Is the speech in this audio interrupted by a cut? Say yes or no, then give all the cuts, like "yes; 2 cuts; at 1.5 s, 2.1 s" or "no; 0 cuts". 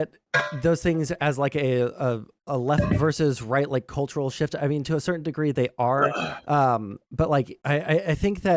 yes; 1 cut; at 7.6 s